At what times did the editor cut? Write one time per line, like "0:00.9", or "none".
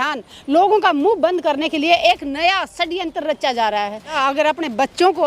0:04.1